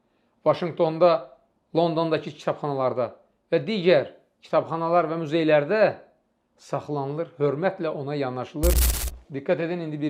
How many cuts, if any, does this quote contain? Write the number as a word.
one